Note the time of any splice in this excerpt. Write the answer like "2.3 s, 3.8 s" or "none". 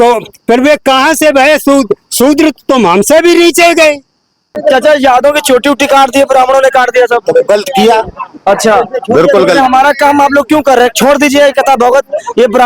4.6 s